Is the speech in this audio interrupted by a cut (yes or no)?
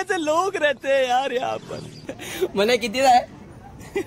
yes